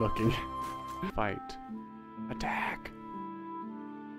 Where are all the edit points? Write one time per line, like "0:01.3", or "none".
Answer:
0:01.1

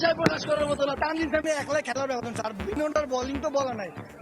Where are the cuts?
0:00.9

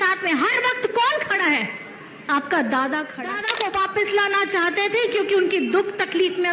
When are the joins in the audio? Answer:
0:03.4

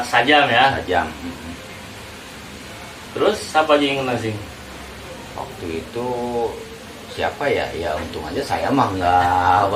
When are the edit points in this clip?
none

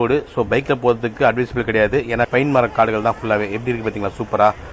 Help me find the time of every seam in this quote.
0:02.3

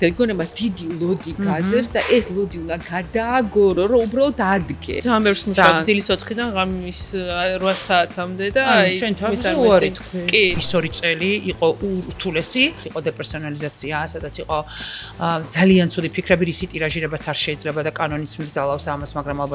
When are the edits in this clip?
0:05.0
0:10.5
0:12.8

